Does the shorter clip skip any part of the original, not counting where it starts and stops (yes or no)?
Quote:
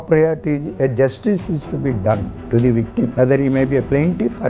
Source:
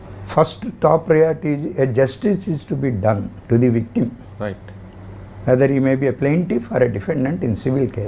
yes